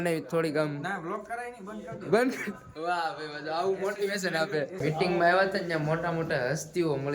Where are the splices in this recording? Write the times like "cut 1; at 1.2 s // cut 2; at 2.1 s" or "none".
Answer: cut 1; at 4.8 s